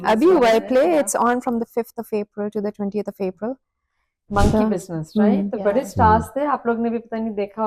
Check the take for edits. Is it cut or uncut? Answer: uncut